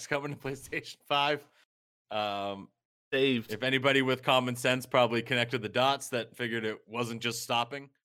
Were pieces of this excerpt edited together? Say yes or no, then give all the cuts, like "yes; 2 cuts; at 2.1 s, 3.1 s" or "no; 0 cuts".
no; 0 cuts